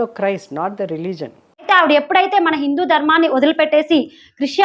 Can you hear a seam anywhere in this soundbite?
yes; 1 cut; at 1.7 s

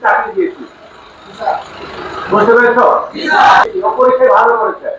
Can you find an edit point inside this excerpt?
yes; 1 cut; at 3.6 s

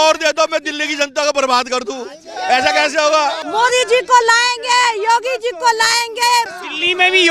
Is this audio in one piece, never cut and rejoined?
no; 2 cuts; at 3.4 s, 6.5 s

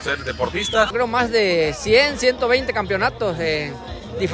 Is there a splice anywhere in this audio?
yes; 1 cut; at 0.9 s

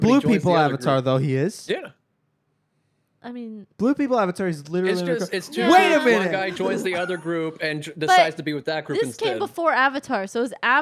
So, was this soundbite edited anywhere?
no; 0 cuts

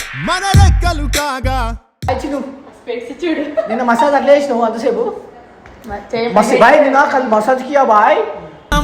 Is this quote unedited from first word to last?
no; 1 cut; at 2.1 s

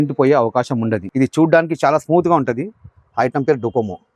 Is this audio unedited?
no; 1 cut; at 1.1 s

